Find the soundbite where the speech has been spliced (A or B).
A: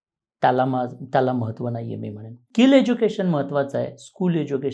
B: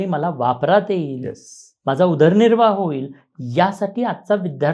A